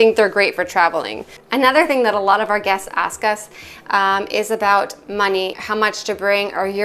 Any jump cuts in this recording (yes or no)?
yes